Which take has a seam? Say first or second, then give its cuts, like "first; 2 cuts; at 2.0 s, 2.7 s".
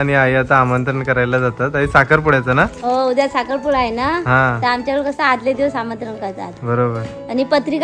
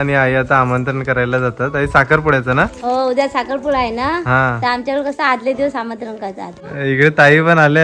second; 1 cut; at 6.5 s